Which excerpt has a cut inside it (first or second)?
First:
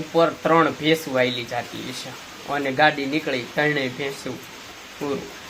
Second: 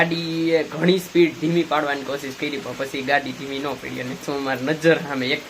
second